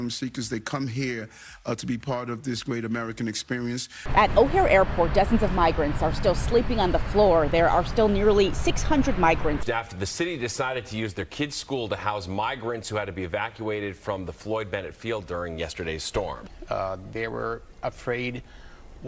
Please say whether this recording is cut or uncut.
uncut